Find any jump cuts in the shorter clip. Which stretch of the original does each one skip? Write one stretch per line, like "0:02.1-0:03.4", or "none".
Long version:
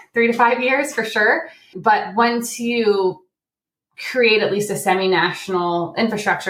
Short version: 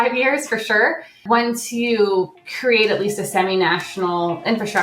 0:01.7-0:02.1
0:03.3-0:04.0

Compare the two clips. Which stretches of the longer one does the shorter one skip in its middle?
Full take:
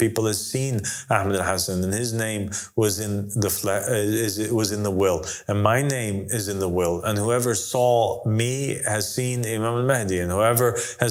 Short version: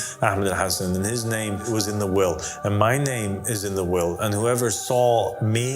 0:02.5-0:04.5

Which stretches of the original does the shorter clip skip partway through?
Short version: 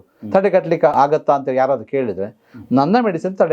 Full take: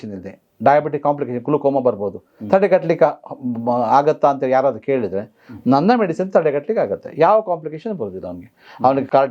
0:03.1-0:03.9

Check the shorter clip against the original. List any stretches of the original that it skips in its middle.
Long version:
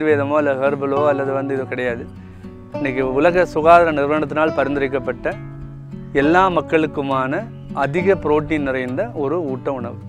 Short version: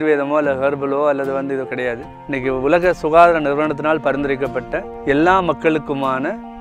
0:02.1-0:02.7
0:05.4-0:05.9

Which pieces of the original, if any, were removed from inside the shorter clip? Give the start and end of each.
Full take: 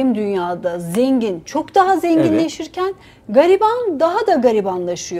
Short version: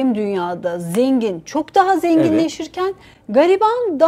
none

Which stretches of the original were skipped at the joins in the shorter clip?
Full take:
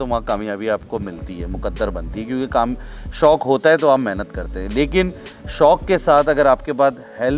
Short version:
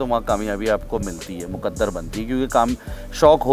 none

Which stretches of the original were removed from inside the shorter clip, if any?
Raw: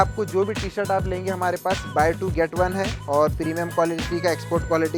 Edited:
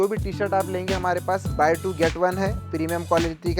0:03.0-0:03.3

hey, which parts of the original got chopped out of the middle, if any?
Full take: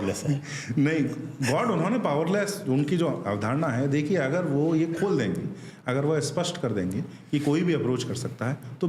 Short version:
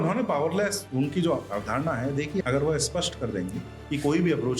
0:04.2-0:05.8

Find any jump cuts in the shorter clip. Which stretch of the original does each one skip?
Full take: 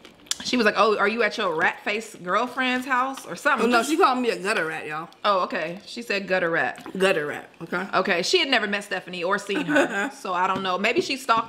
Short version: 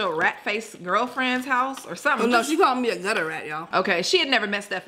0:05.1-0:07.9

